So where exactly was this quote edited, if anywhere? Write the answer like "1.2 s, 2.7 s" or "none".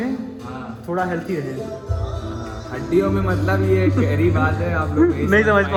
none